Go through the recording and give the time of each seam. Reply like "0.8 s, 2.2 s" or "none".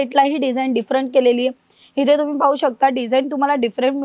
none

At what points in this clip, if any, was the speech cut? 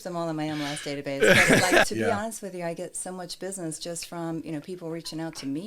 1.9 s

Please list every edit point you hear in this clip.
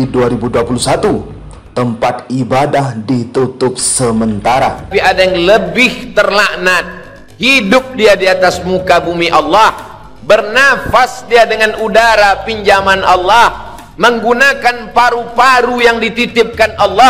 4.8 s

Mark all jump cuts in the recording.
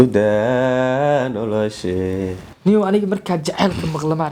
2.5 s

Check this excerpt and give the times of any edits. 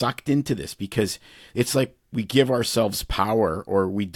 none

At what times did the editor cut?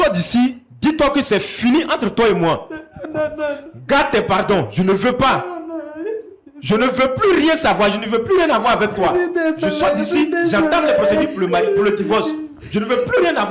none

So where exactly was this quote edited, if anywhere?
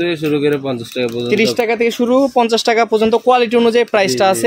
none

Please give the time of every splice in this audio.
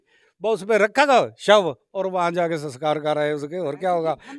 none

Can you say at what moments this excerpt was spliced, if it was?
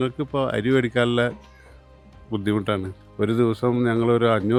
none

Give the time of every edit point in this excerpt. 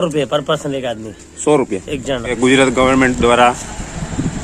2.3 s

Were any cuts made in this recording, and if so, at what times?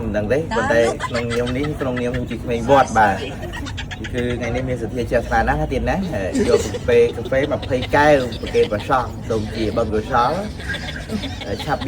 none

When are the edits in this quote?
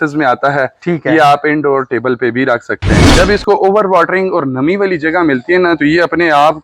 3.0 s

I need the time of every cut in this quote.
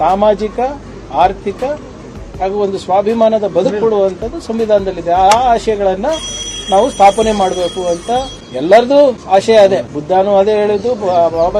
8.4 s, 9.2 s, 9.9 s

